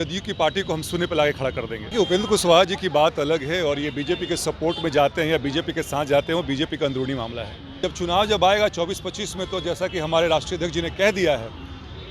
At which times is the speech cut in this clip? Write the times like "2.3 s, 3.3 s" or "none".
1.8 s, 7.8 s